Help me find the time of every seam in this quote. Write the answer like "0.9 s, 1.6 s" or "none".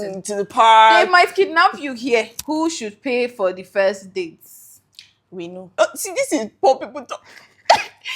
2.4 s, 5.8 s